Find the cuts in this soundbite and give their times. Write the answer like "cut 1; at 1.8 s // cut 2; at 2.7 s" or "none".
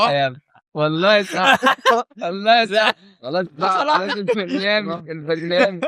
none